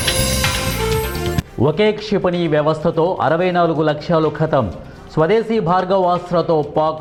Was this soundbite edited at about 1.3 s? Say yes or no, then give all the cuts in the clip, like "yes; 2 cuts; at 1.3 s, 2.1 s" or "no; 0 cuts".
no; 0 cuts